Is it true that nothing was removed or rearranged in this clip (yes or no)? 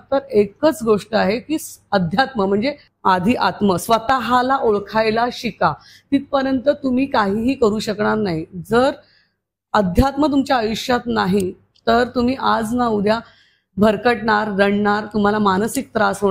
no